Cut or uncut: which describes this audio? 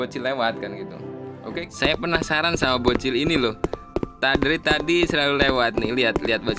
cut